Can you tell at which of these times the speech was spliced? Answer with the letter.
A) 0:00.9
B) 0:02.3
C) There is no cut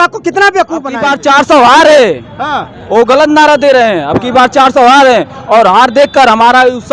A